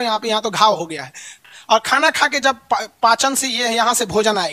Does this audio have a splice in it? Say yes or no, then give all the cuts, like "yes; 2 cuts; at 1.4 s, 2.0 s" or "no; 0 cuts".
yes; 1 cut; at 1.3 s